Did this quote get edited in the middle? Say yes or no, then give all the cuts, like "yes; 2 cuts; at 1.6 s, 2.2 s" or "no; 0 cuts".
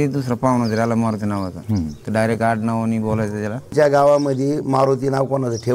yes; 1 cut; at 3.7 s